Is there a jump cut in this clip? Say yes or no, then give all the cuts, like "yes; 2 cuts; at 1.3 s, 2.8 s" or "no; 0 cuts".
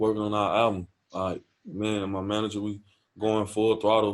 no; 0 cuts